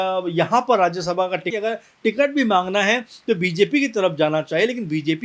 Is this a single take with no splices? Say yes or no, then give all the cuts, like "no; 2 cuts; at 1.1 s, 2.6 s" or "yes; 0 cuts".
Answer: no; 1 cut; at 1.5 s